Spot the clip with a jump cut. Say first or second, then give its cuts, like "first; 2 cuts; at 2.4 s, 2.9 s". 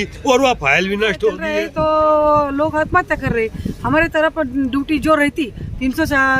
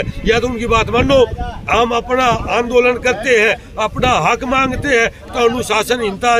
first; 1 cut; at 1.5 s